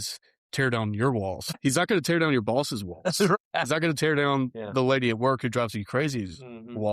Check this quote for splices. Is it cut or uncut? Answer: cut